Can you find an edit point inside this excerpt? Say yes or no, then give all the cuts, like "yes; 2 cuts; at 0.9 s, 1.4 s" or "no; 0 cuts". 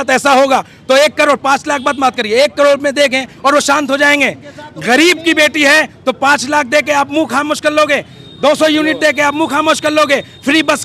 no; 0 cuts